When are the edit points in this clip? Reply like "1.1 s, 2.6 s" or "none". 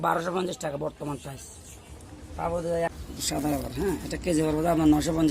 2.9 s